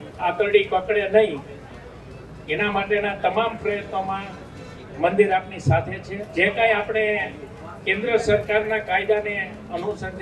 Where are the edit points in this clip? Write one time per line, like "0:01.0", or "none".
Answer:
0:06.1